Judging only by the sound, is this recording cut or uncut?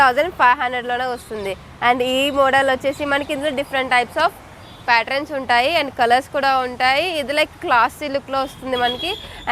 uncut